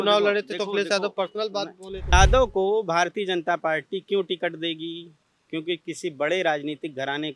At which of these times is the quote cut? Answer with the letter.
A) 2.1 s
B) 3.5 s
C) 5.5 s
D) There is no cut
A